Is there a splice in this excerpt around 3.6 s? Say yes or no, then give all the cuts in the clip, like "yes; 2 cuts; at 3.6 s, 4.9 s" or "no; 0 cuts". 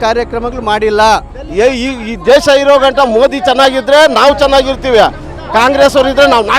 no; 1 cut; at 1.4 s